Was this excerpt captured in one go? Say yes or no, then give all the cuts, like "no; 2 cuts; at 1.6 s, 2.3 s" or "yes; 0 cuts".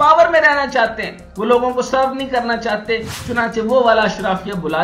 yes; 0 cuts